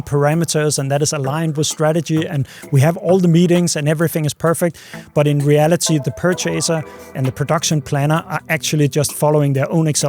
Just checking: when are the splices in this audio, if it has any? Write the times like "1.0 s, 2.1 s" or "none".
6.0 s, 7.2 s

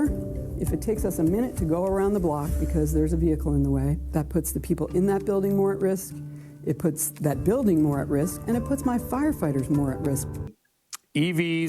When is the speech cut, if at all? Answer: 10.4 s

